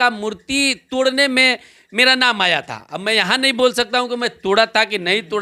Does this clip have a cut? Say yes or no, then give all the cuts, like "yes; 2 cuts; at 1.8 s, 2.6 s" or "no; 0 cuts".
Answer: no; 0 cuts